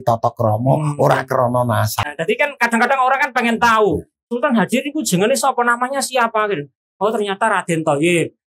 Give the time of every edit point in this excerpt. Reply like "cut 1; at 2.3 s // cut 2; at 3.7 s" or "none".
cut 1; at 1.9 s